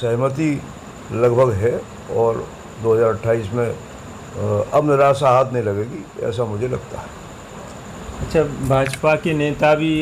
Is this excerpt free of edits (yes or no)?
yes